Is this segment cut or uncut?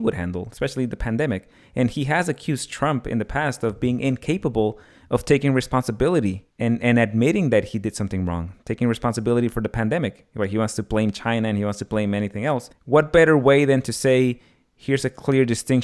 cut